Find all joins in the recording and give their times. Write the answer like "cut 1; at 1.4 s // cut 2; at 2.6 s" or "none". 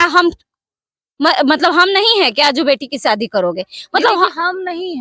none